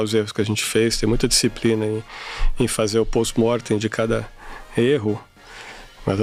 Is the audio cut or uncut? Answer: uncut